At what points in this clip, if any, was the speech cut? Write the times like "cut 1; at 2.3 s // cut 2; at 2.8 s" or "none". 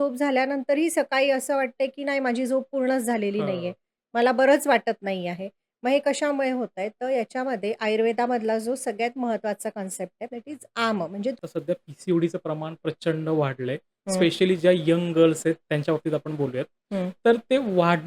cut 1; at 11.4 s

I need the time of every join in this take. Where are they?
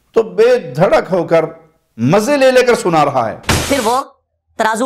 cut 1; at 3.7 s

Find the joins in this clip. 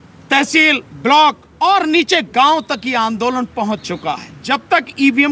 cut 1; at 1.5 s // cut 2; at 4.3 s

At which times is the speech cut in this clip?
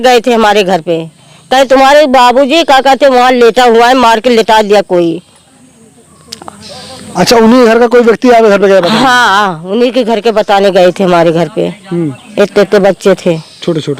none

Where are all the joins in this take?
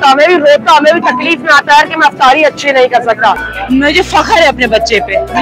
cut 1; at 3.5 s

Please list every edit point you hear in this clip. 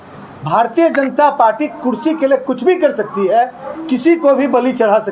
none

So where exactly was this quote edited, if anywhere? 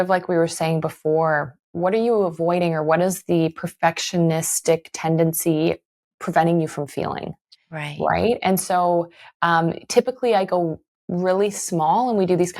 none

